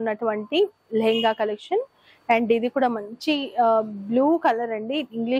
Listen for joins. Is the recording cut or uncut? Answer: uncut